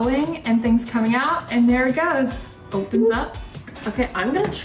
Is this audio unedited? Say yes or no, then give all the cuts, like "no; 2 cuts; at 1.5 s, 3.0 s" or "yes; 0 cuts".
no; 1 cut; at 3.6 s